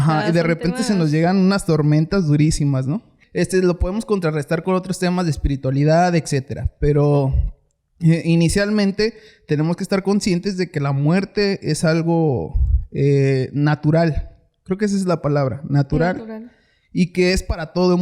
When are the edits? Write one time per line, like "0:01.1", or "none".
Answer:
0:03.2